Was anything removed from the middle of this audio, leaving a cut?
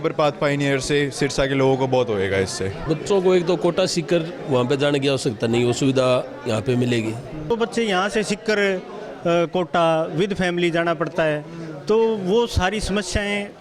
yes; 2 cuts; at 2.8 s, 7.5 s

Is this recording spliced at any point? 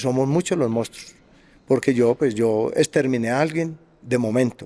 no; 0 cuts

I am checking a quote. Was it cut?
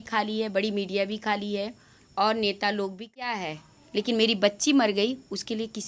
yes; 1 cut; at 3.3 s

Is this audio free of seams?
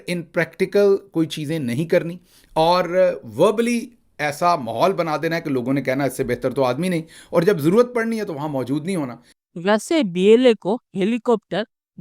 yes; 0 cuts

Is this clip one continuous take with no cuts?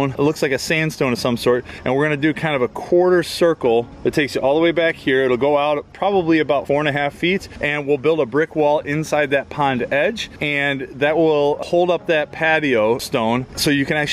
no; 1 cut; at 6.6 s

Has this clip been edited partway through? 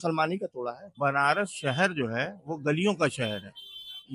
yes; 1 cut; at 0.9 s

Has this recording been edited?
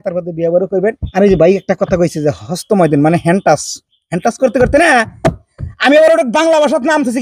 yes; 1 cut; at 1.0 s

